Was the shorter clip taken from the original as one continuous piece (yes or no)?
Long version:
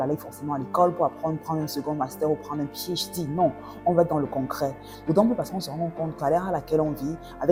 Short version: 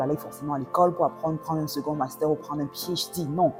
yes